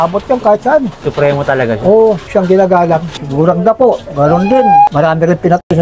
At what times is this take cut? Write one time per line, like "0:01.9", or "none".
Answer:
0:01.0
0:02.2
0:03.2
0:04.9